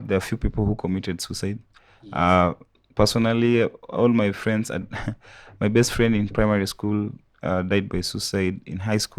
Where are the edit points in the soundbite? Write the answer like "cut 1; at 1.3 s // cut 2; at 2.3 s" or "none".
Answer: none